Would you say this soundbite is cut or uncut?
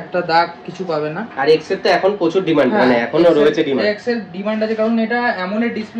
uncut